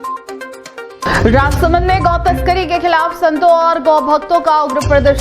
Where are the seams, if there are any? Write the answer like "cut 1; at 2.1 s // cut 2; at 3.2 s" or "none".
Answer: cut 1; at 1.1 s